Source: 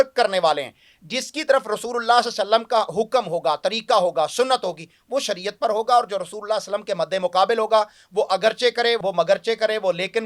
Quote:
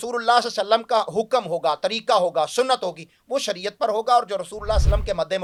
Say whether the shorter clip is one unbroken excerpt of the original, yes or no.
yes